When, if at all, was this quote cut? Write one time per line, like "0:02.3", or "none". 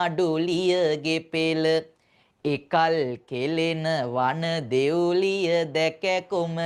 none